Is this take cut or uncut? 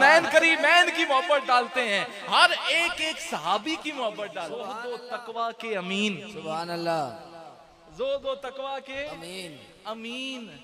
cut